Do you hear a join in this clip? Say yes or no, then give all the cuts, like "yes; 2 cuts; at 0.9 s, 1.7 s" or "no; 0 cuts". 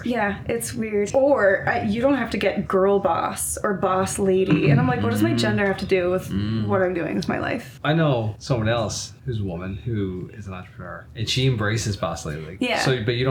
yes; 6 cuts; at 1.1 s, 7.7 s, 8.4 s, 9.1 s, 11.0 s, 12.4 s